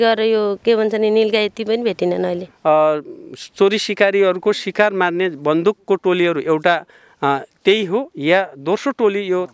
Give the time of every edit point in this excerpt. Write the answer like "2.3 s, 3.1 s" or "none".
2.3 s